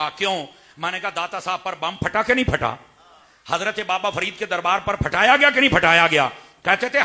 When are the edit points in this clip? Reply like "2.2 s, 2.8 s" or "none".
none